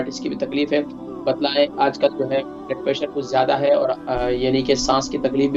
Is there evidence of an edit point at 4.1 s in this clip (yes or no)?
no